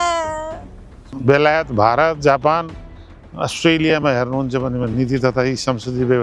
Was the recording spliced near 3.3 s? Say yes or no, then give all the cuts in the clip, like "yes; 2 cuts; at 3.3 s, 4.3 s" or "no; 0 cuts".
no; 1 cut; at 1.1 s